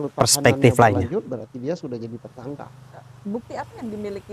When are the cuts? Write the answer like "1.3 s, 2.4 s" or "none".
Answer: 1.0 s